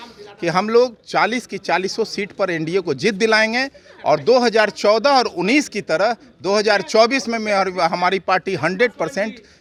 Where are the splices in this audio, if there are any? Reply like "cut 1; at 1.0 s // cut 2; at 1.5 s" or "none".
none